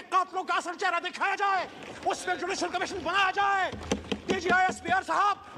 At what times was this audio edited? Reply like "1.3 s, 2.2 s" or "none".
none